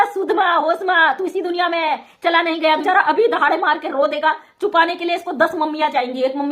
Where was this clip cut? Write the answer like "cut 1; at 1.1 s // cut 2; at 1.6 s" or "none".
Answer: cut 1; at 2.8 s